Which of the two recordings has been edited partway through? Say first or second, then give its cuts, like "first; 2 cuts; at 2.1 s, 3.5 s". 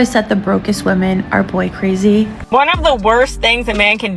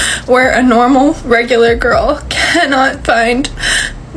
first; 1 cut; at 2.4 s